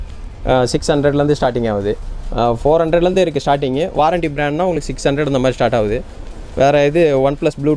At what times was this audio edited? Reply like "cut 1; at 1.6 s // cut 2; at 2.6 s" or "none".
none